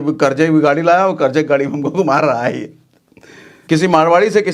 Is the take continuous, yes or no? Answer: no